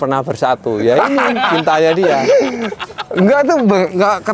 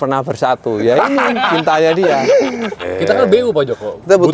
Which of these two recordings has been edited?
second; 1 cut; at 2.9 s

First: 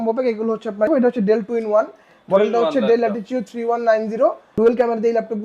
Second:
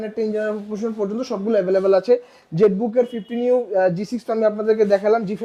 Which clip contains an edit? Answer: first; 2 cuts; at 0.9 s, 4.4 s

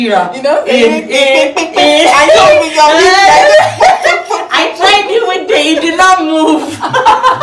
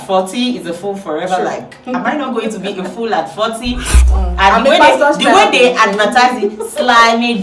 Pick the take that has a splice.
second; 1 cut; at 3.9 s

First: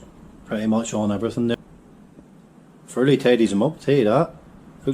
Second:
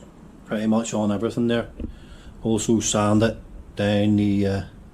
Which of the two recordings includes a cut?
first; 1 cut; at 1.6 s

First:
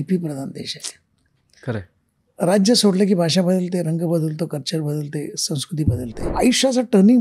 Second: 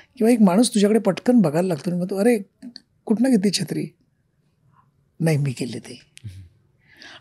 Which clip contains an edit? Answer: first; 1 cut; at 6.3 s

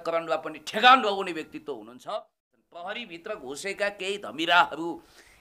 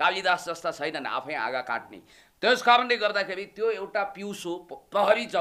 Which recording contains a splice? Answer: first; 1 cut; at 2.5 s

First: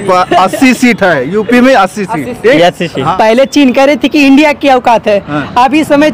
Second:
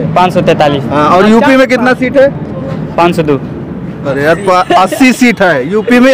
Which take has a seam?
first; 1 cut; at 3.1 s

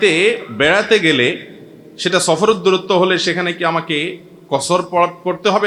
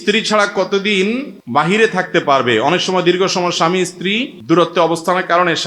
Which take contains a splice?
second; 2 cuts; at 1.3 s, 4.3 s

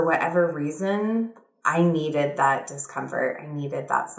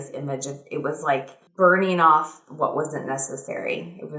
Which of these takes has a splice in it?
second; 1 cut; at 1.4 s

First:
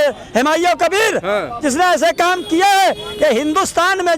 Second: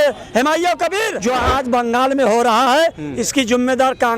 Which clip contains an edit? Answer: second; 1 cut; at 1.1 s

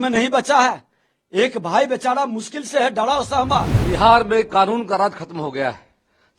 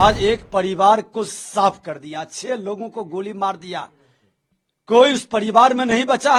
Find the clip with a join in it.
first; 1 cut; at 3.8 s

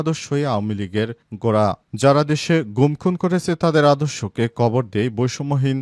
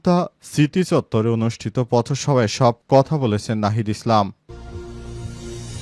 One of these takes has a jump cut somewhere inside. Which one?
second; 1 cut; at 4.4 s

